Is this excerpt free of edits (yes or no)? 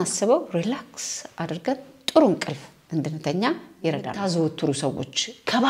no